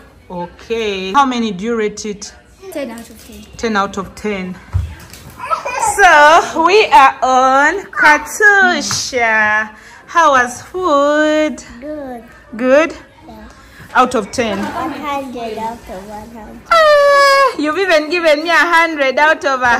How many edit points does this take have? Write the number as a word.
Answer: three